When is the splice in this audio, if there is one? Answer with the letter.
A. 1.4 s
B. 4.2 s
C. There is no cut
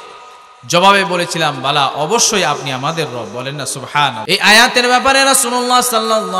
B